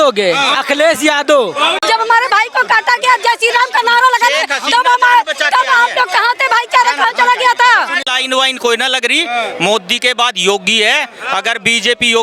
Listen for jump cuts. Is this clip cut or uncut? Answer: cut